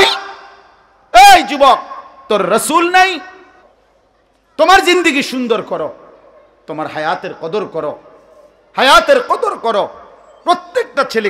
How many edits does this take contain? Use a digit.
1